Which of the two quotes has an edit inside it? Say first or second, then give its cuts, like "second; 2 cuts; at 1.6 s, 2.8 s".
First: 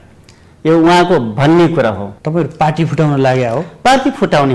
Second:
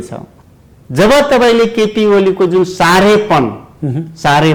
first; 1 cut; at 2.1 s